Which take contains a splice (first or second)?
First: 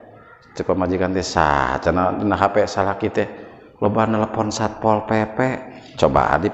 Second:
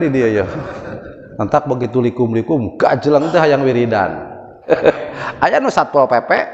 second